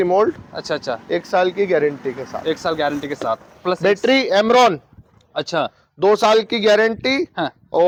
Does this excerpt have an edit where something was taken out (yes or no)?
no